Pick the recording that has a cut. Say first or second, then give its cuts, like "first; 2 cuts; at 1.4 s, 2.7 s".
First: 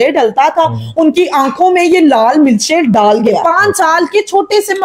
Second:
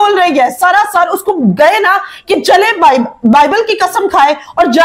first; 1 cut; at 3.4 s